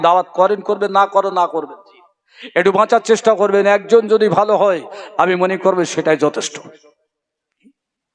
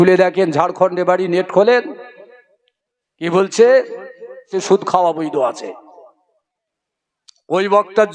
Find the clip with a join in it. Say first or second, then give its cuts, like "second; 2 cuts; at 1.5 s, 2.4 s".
second; 1 cut; at 4.6 s